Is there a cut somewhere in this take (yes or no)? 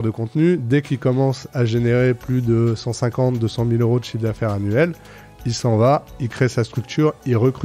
no